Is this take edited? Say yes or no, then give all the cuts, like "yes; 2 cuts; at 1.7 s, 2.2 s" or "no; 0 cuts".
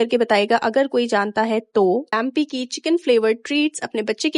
yes; 1 cut; at 2.2 s